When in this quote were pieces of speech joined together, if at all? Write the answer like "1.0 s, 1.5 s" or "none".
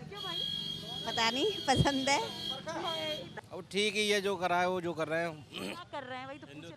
3.3 s